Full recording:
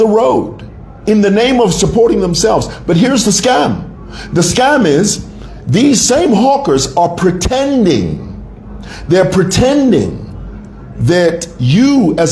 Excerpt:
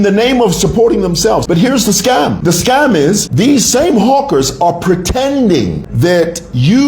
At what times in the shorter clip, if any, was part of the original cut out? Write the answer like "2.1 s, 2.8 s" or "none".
1.4 s, 2.4 s, 3.3 s, 5.8 s